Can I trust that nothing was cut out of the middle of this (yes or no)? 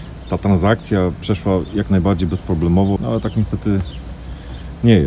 no